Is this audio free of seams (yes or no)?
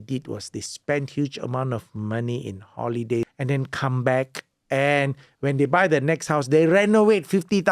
no